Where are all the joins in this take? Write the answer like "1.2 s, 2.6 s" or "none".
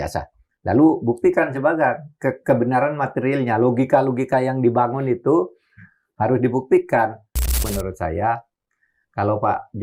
7.6 s

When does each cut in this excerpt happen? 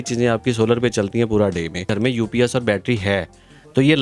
1.9 s

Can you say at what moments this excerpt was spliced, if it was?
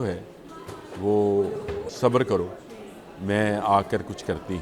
1.8 s

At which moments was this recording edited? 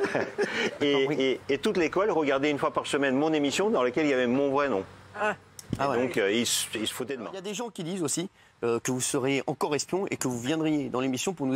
7.4 s

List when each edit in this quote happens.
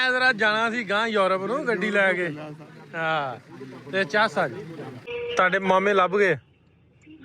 5.0 s

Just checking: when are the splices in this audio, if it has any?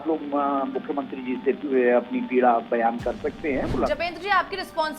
3.7 s

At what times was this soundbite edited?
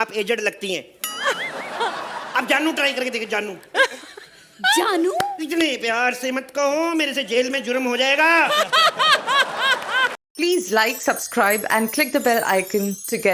10.2 s

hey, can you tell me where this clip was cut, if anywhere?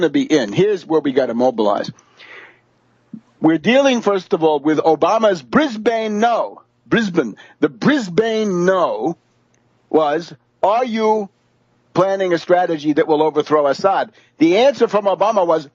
none

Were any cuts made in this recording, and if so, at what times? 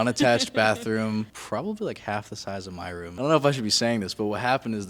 1.4 s, 3.1 s

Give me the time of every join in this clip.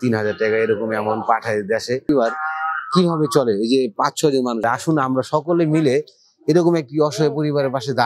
2.1 s, 4.6 s

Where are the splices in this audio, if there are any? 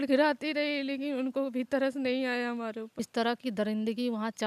2.9 s

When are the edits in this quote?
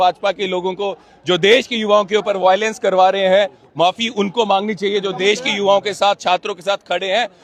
none

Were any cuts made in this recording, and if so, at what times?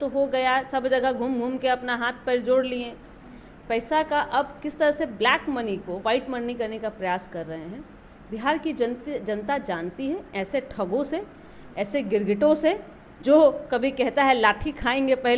none

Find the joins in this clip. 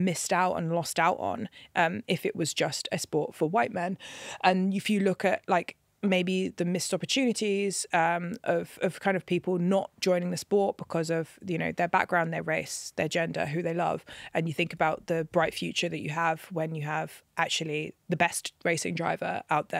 none

